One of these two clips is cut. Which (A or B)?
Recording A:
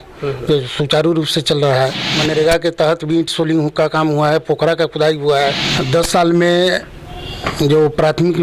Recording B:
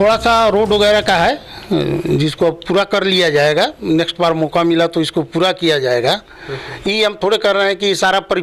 A